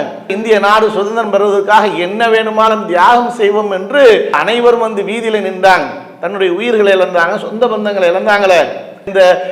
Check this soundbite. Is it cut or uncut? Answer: uncut